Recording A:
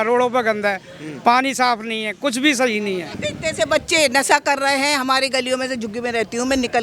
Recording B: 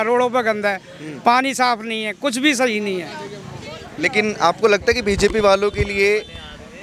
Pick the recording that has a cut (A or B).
A